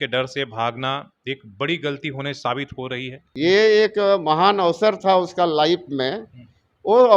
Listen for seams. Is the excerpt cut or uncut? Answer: cut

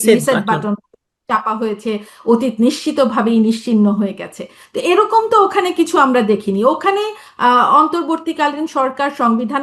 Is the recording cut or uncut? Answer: uncut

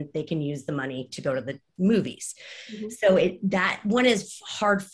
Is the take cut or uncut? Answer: uncut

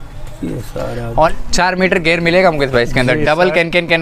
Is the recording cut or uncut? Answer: cut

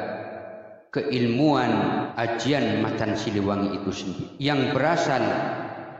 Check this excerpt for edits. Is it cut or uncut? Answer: cut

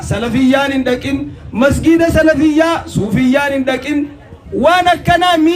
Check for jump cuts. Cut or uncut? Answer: uncut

